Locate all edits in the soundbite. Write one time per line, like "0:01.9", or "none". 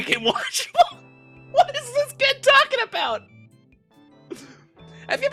none